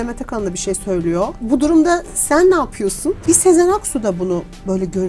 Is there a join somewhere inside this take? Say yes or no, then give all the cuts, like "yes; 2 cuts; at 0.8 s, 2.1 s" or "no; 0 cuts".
yes; 2 cuts; at 1.4 s, 3.2 s